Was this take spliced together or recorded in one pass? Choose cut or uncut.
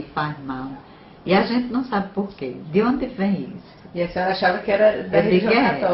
uncut